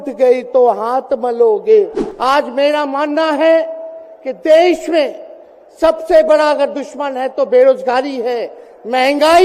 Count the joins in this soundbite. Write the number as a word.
one